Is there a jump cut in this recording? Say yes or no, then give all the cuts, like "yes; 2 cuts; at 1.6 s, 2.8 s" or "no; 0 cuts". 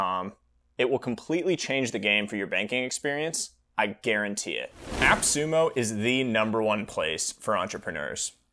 yes; 1 cut; at 4.8 s